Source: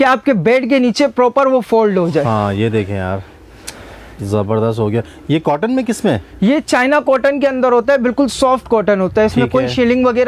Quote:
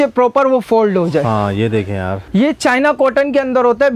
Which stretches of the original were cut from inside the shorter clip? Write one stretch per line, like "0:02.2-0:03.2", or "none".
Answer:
0:03.2-0:06.3